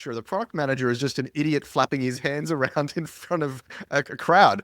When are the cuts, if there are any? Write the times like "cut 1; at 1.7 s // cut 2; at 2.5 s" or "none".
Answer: none